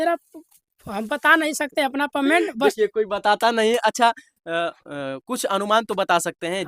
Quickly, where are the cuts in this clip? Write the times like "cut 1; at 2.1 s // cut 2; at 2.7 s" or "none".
none